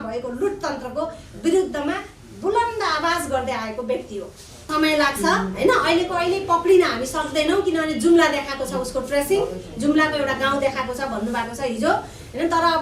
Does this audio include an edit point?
yes; 1 cut; at 4.6 s

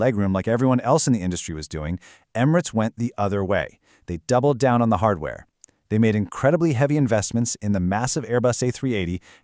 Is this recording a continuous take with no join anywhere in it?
yes; 0 cuts

